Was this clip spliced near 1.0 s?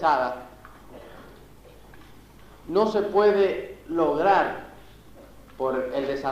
yes; 1 cut; at 1.0 s

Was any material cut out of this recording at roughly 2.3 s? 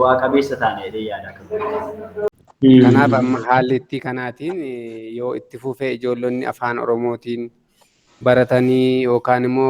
yes; 1 cut; at 2.3 s

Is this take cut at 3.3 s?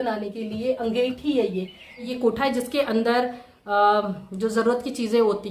no; 1 cut; at 2.1 s

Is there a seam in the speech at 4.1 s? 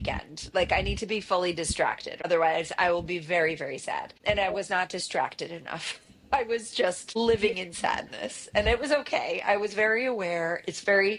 yes; 3 cuts; at 2.2 s, 4.1 s, 7.2 s

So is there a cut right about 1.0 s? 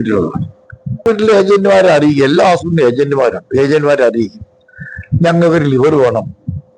yes; 1 cut; at 1.0 s

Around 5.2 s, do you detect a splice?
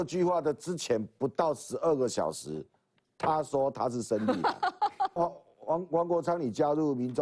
yes; 1 cut; at 5.2 s

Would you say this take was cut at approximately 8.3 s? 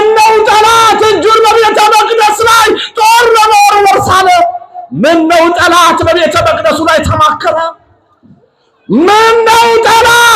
no; 0 cuts

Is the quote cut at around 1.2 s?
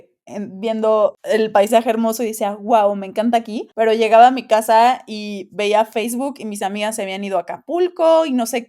yes; 2 cuts; at 1.2 s, 3.6 s

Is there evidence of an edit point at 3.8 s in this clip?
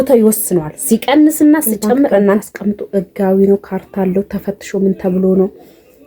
no; 1 cut; at 2.4 s

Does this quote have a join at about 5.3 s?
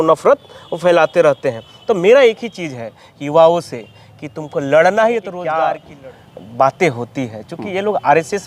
yes; 1 cut; at 5.3 s

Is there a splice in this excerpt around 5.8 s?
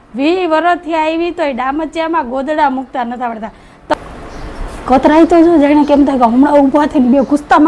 no; 1 cut; at 3.9 s

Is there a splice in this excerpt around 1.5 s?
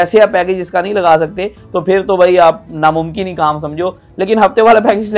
yes; 2 cuts; at 1.5 s, 4.1 s

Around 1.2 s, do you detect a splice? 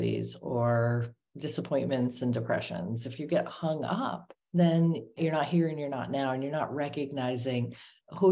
yes; 3 cuts; at 1.2 s, 4.3 s, 5.2 s

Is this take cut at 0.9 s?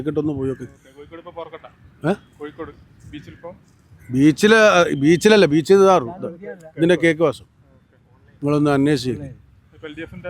no; 0 cuts

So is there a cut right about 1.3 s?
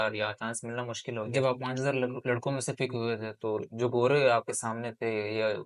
yes; 1 cut; at 1.3 s

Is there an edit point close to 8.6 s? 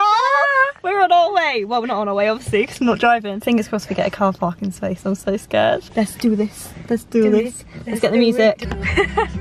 yes; 3 cuts; at 3.3 s, 5.9 s, 8.6 s

